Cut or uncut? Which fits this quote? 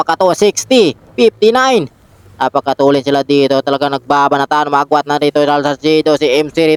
uncut